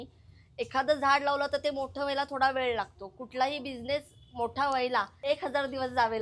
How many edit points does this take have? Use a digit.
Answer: 1